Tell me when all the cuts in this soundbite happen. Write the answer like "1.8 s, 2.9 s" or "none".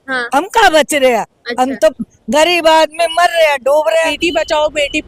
4.1 s